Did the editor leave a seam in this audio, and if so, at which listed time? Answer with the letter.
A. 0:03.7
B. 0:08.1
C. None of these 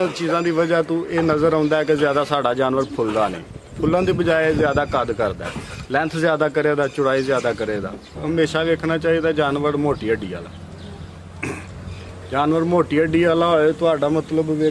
B